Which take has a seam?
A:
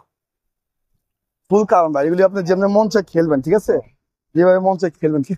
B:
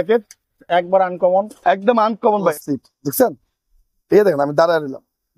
B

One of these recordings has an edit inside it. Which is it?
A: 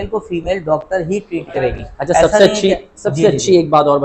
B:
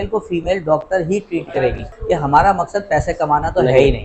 B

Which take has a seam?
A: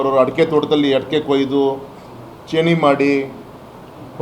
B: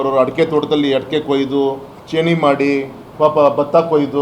B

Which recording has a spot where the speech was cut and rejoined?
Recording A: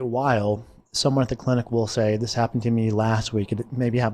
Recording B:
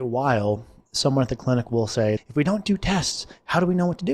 B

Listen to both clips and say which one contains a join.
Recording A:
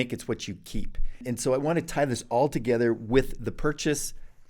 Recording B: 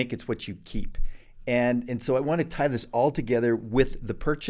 A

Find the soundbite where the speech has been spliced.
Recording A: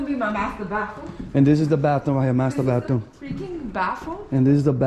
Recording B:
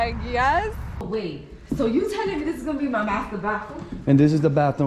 B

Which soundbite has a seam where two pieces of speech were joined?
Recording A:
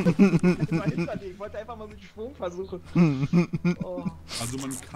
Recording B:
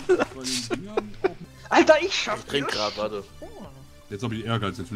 B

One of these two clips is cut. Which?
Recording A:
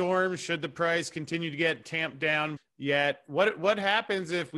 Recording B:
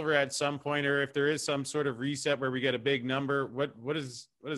A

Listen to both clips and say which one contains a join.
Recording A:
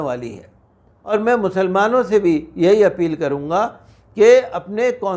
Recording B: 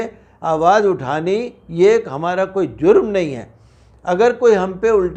A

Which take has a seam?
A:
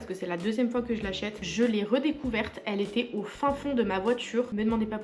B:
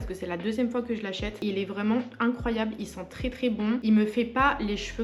A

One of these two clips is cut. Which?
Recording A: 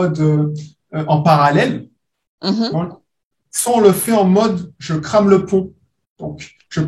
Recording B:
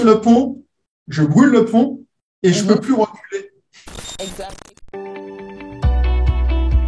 B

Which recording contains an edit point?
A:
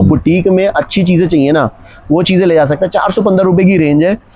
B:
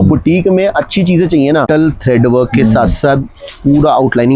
B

